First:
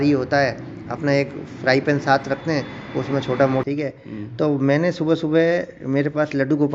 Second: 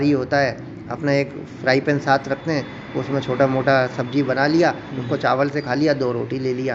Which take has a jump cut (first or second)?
first